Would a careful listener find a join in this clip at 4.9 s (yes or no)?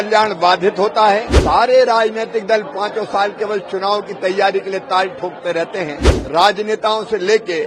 no